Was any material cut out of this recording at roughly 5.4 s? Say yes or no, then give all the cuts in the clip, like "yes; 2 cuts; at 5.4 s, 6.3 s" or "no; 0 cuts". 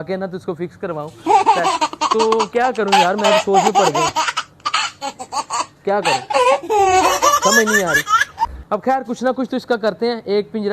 no; 1 cut; at 1.3 s